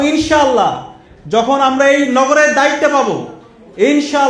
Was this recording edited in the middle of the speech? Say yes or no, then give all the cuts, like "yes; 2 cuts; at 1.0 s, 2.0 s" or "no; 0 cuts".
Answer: no; 0 cuts